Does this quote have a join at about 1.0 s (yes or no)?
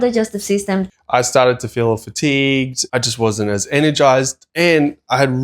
yes